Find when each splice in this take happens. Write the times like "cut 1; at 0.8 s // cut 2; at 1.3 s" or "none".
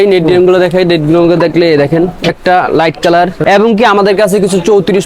cut 1; at 2.3 s // cut 2; at 3.4 s